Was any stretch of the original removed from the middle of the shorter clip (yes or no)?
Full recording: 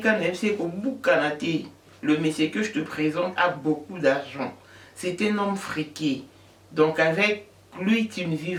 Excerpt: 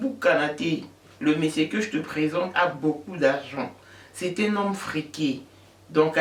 no